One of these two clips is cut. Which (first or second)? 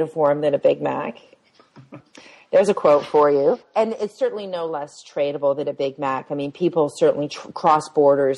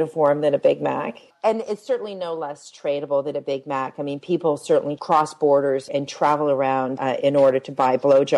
second